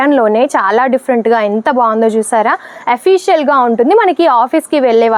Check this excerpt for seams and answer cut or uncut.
uncut